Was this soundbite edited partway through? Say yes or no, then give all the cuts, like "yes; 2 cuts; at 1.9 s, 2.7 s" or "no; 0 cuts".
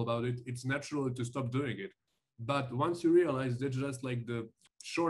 no; 0 cuts